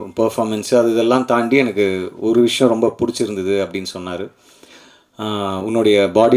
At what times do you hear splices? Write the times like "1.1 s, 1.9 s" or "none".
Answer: none